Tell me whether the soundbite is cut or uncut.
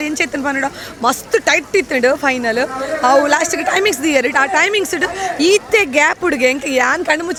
uncut